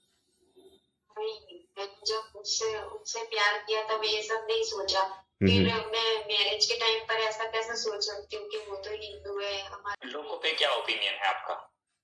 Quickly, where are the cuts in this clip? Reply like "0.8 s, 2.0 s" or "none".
10.0 s